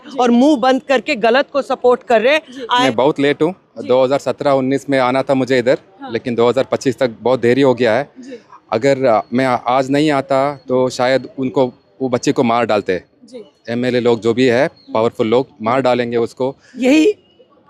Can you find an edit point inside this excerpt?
yes; 2 cuts; at 2.9 s, 16.7 s

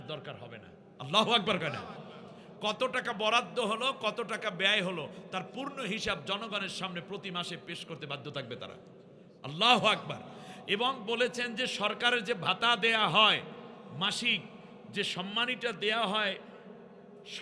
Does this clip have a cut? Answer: no; 0 cuts

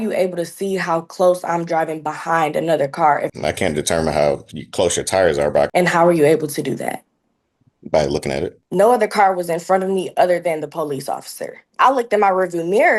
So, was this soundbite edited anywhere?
yes; 4 cuts; at 3.3 s, 5.7 s, 8.6 s, 11.7 s

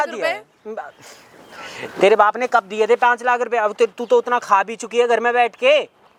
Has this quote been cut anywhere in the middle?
no; 0 cuts

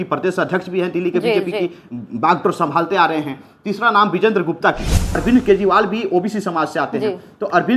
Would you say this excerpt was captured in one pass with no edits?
no; 1 cut; at 5.2 s

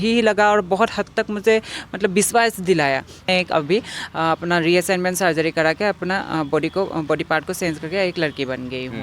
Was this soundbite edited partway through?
yes; 1 cut; at 3.2 s

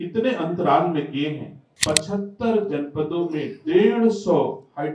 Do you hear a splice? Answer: yes; 1 cut; at 1.7 s

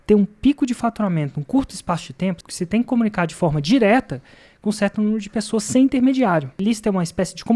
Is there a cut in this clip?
yes; 2 cuts; at 2.4 s, 6.6 s

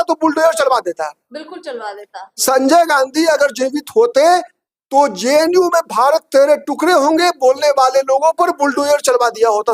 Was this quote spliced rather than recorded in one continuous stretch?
no; 0 cuts

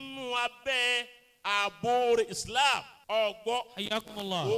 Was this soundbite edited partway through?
yes; 1 cut; at 2.9 s

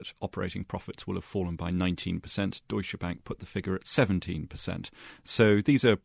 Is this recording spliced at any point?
no; 0 cuts

